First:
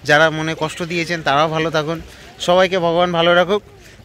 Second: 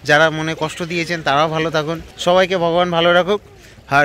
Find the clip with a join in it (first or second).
second